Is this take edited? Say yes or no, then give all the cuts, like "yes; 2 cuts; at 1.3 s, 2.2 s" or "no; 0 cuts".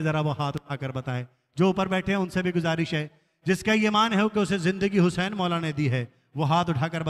no; 0 cuts